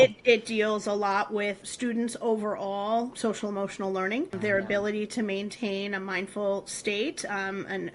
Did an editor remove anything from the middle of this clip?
yes; 3 cuts; at 1.7 s, 3.1 s, 4.3 s

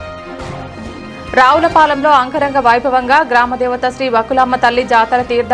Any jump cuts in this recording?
no; 0 cuts

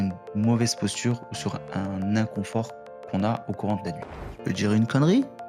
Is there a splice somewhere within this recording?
yes; 1 cut; at 4.1 s

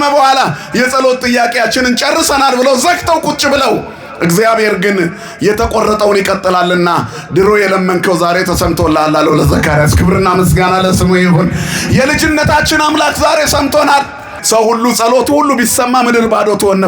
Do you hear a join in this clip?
yes; 1 cut; at 14.3 s

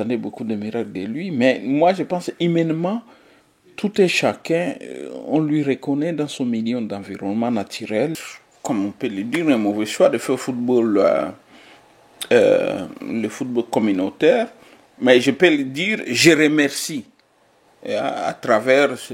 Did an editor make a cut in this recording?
yes; 1 cut; at 8.3 s

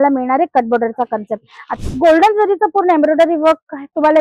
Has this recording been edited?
yes; 1 cut; at 1.7 s

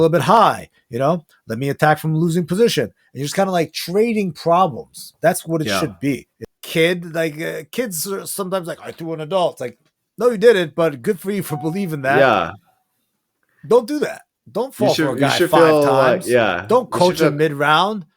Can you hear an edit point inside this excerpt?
yes; 1 cut; at 6.5 s

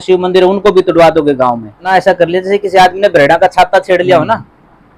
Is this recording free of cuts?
no; 1 cut; at 1.9 s

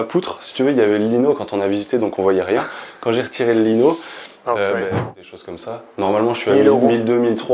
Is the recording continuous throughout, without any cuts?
no; 1 cut; at 5.0 s

